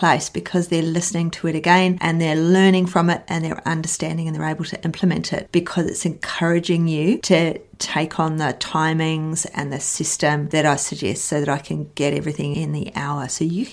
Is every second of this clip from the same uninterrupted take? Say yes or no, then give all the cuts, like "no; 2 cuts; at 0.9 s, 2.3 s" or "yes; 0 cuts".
yes; 0 cuts